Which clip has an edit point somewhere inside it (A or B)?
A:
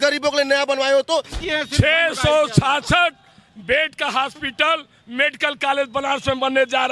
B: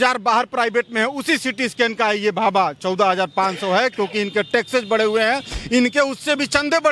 A